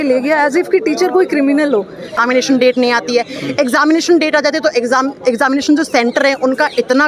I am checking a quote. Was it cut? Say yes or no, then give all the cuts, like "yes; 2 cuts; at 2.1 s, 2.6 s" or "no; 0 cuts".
yes; 1 cut; at 2.2 s